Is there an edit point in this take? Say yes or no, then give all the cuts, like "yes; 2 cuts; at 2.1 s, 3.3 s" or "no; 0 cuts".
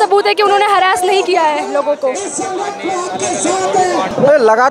no; 0 cuts